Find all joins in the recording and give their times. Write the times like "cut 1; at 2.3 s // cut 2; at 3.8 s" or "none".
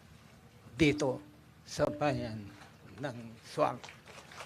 cut 1; at 1.0 s